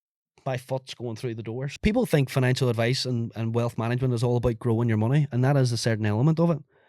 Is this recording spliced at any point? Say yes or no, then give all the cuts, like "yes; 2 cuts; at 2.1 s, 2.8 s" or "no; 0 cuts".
yes; 1 cut; at 1.7 s